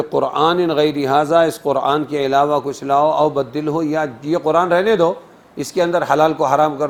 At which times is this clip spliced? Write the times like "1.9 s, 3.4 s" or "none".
none